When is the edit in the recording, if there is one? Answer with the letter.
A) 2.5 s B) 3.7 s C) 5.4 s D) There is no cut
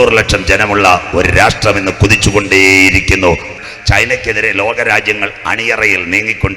B